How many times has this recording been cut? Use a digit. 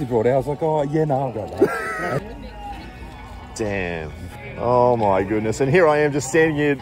2